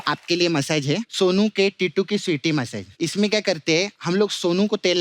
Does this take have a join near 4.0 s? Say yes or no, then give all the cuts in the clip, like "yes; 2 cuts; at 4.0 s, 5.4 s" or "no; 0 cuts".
yes; 3 cuts; at 1.1 s, 2.8 s, 4.0 s